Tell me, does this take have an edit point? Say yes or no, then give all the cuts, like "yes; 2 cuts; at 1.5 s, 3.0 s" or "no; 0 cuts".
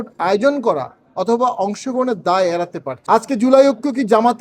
yes; 1 cut; at 2.9 s